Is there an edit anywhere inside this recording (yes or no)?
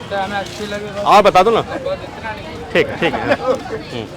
no